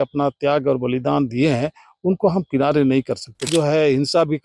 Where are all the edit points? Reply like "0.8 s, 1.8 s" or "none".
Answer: 3.5 s